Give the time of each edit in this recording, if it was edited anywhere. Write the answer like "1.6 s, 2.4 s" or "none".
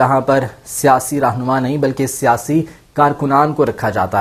none